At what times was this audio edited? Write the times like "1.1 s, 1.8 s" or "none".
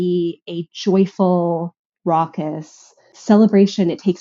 3.1 s